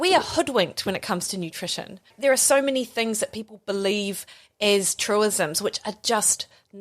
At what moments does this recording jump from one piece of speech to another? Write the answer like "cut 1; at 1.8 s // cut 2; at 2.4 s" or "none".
cut 1; at 2.1 s